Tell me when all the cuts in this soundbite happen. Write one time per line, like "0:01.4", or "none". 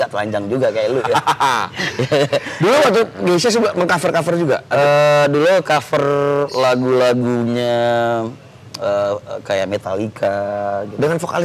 none